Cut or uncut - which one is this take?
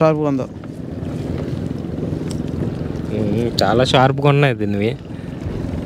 uncut